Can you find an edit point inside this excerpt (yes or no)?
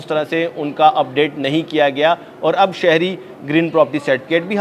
no